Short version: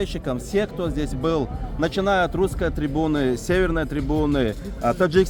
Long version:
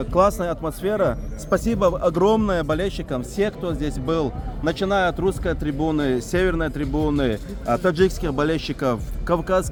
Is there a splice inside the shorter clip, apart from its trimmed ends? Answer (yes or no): no